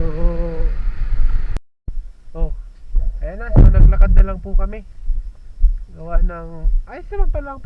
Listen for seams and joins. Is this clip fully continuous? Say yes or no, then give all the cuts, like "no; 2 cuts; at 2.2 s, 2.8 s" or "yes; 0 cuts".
no; 1 cut; at 1.5 s